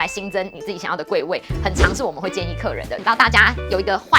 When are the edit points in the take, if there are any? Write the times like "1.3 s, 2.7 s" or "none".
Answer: 3.0 s